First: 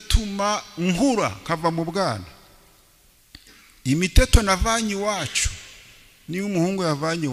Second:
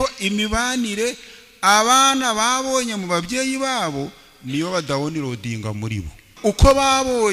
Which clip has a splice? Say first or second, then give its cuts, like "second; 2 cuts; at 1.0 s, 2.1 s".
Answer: second; 1 cut; at 6.4 s